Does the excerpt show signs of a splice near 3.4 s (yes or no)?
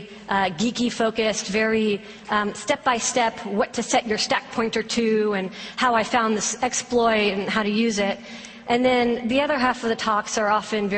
yes